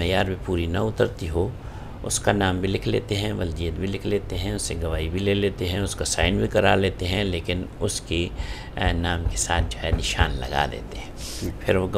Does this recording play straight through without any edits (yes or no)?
yes